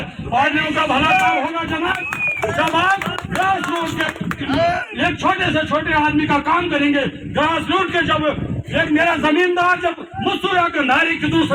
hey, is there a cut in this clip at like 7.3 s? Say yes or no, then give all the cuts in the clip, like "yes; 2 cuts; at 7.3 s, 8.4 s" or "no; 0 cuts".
no; 0 cuts